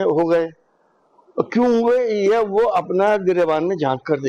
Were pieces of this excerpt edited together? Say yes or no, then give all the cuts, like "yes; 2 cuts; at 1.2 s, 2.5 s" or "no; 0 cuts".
no; 0 cuts